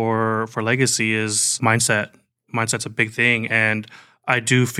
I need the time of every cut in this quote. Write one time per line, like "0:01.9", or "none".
0:01.5